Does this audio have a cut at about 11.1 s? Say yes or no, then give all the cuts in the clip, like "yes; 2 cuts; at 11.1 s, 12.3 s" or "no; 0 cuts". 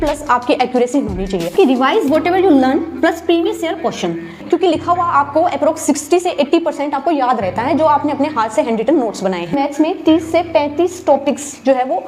no; 3 cuts; at 1.5 s, 4.4 s, 9.5 s